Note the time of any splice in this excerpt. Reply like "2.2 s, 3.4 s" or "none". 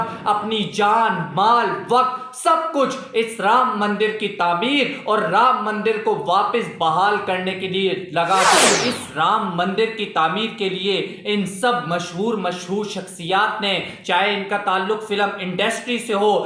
8.7 s

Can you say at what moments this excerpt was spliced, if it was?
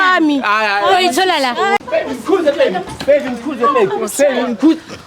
1.8 s

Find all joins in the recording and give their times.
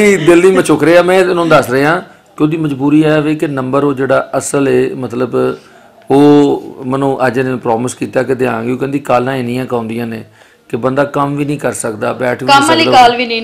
none

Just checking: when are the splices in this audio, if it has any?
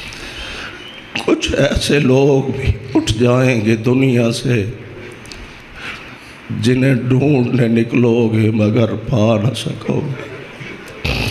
none

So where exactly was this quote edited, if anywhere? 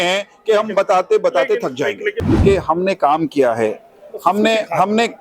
2.2 s

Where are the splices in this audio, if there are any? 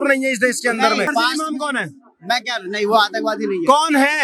1.1 s

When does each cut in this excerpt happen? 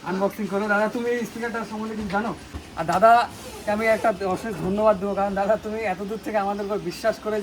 2.6 s

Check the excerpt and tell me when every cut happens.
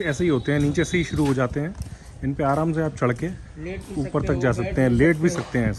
none

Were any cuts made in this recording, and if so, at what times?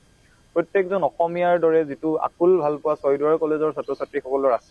none

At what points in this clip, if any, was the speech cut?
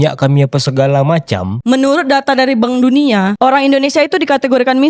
1.6 s, 3.3 s

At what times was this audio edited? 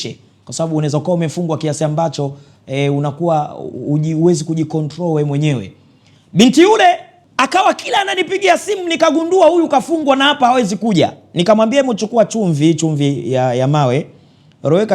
7.2 s

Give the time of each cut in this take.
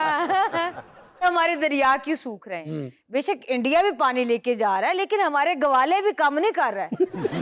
1.2 s

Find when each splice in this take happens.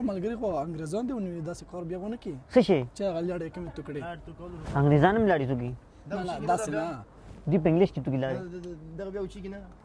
none

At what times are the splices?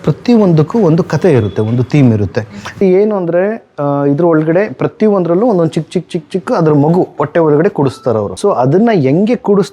2.8 s, 8.3 s

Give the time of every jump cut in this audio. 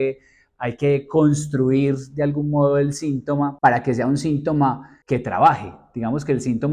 3.5 s, 4.9 s

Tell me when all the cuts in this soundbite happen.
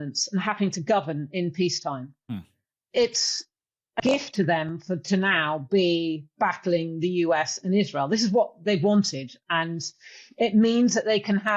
2.6 s

